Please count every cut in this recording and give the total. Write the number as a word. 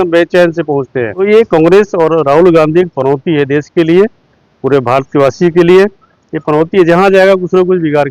one